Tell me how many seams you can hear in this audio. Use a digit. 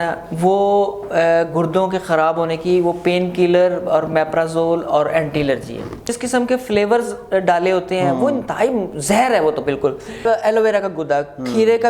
2